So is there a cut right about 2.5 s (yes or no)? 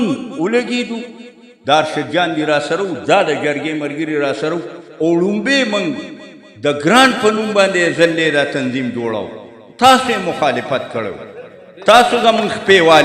no